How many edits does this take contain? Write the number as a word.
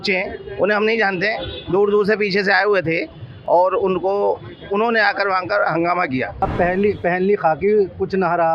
one